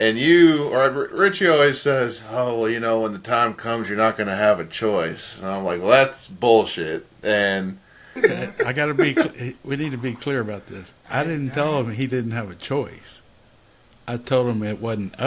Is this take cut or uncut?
cut